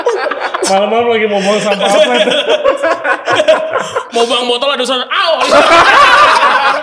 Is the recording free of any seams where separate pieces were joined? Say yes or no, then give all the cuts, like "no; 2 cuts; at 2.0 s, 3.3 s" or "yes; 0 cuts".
yes; 0 cuts